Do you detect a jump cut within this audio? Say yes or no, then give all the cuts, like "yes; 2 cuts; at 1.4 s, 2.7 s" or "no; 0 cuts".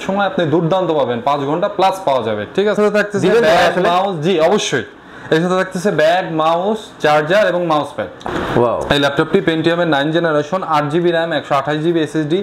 yes; 2 cuts; at 2.8 s, 8.1 s